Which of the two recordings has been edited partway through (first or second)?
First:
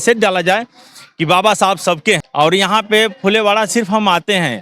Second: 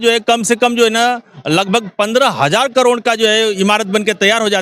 first